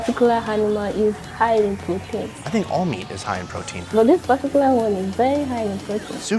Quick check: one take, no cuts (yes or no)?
no